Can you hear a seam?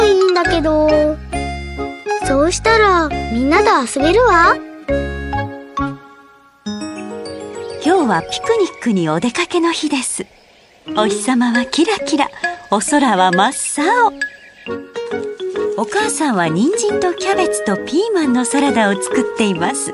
no; 0 cuts

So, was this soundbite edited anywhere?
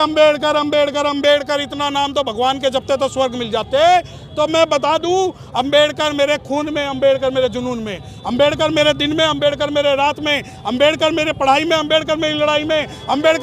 no; 0 cuts

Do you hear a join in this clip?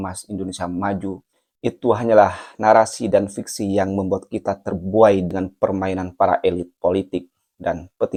no; 0 cuts

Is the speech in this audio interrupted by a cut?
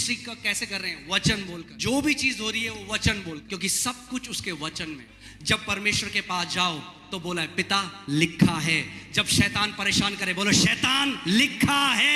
yes; 3 cuts; at 1.7 s, 3.4 s, 5.1 s

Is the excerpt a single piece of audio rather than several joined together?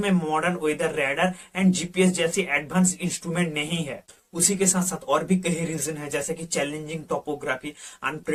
yes; 0 cuts

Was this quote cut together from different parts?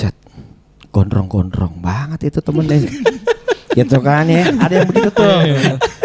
no; 0 cuts

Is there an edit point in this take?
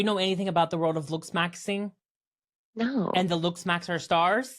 no; 0 cuts

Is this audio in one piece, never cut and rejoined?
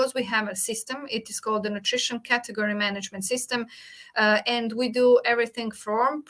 yes; 0 cuts

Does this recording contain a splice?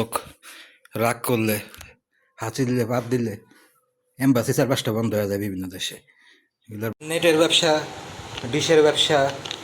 yes; 1 cut; at 6.9 s

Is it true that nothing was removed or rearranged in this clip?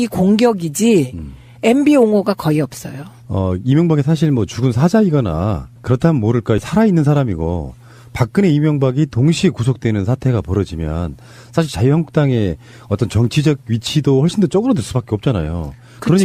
yes; 0 cuts

